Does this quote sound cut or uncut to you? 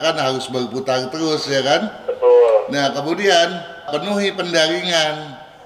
uncut